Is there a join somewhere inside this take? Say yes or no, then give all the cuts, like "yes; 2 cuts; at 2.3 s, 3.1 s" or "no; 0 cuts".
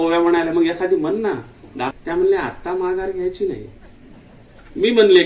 yes; 1 cut; at 1.9 s